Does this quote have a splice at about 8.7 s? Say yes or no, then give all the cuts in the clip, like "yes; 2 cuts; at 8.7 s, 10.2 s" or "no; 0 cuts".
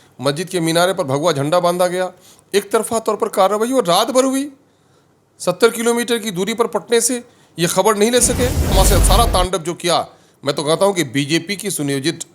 yes; 1 cut; at 8.7 s